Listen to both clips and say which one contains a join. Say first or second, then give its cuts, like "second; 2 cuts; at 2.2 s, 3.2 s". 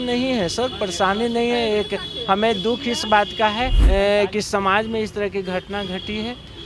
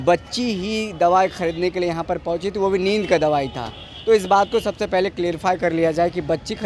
first; 1 cut; at 3.8 s